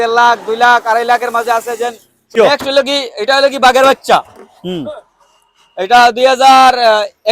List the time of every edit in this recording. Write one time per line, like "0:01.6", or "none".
0:02.3